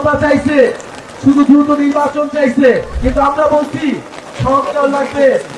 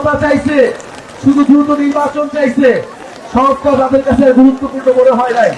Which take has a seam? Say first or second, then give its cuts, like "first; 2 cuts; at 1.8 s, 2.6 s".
first; 1 cut; at 2.9 s